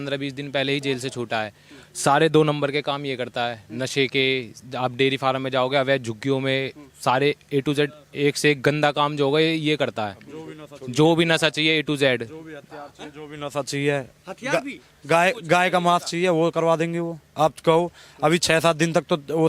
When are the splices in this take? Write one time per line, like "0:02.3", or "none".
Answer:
none